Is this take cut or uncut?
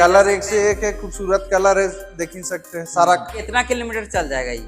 cut